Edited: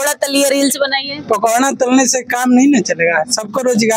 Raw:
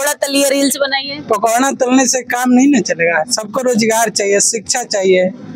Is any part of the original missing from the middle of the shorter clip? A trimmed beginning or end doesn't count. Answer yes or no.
no